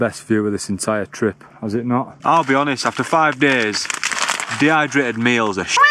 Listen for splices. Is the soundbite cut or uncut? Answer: cut